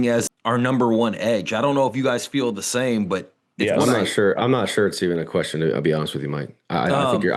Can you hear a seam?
no; 0 cuts

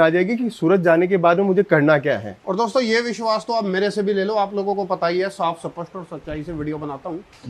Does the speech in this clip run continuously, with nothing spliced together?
yes; 0 cuts

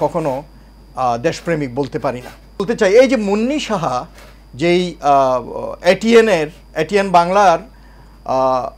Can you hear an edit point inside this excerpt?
yes; 1 cut; at 2.7 s

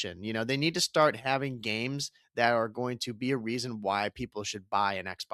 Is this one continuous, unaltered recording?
yes; 0 cuts

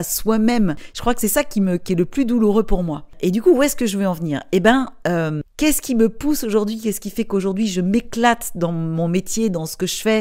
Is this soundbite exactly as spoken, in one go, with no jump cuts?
yes; 0 cuts

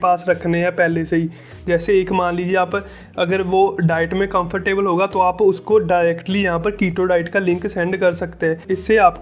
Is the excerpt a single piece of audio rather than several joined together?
yes; 0 cuts

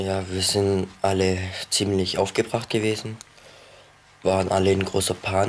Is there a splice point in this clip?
no; 0 cuts

